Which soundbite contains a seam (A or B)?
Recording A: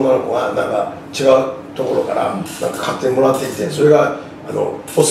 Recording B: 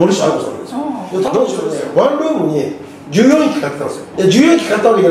B